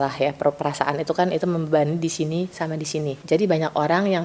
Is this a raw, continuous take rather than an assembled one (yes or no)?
no